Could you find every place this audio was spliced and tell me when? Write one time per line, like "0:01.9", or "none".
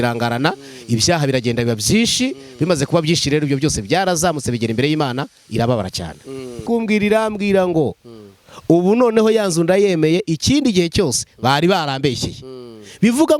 0:06.6